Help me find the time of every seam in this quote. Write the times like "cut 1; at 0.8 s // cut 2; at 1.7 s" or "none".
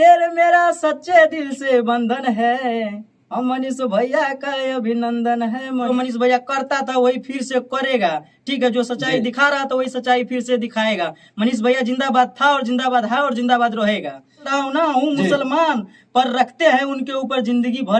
cut 1; at 5.9 s // cut 2; at 14.5 s